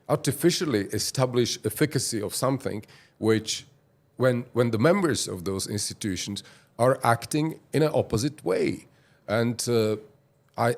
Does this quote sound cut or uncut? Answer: uncut